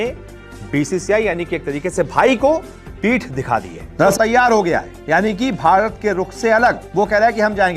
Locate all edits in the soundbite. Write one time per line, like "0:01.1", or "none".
0:04.1